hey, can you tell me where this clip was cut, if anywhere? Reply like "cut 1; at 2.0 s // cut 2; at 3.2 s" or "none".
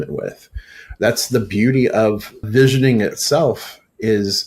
cut 1; at 2.5 s